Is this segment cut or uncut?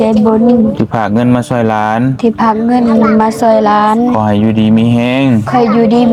uncut